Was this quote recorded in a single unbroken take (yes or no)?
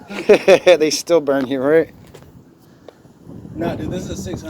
yes